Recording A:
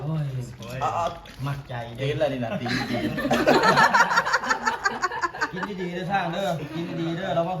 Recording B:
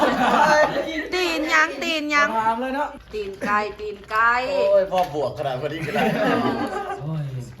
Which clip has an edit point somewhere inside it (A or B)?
B